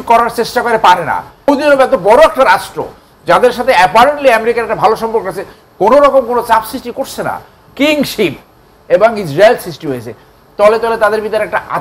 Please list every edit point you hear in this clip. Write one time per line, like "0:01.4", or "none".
0:01.5
0:07.6

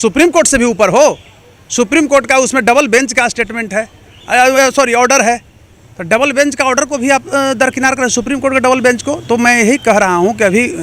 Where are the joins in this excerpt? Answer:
none

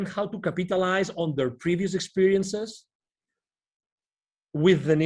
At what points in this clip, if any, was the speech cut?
none

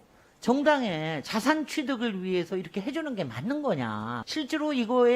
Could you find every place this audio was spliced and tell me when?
0:04.1

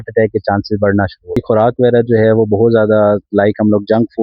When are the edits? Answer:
0:01.4

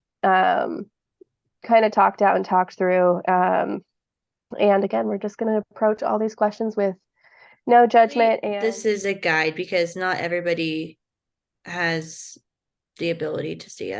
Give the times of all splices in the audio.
0:08.4

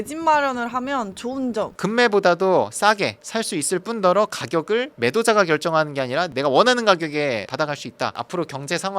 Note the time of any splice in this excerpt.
0:01.7
0:06.3
0:08.1

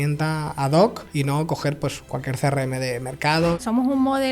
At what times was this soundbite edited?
0:01.0
0:03.6

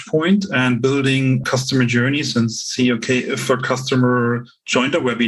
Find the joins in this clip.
0:01.4

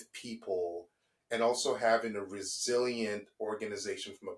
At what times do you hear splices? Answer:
none

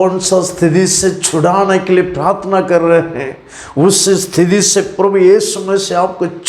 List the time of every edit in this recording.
none

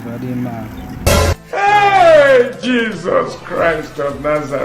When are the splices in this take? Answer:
0:01.0

